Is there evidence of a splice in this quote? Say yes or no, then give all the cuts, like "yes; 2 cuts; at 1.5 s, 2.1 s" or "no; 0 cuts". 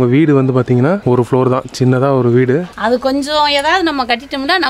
yes; 2 cuts; at 1.0 s, 2.7 s